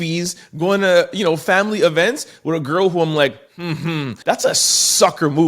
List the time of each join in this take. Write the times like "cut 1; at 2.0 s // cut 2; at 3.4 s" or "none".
cut 1; at 4.2 s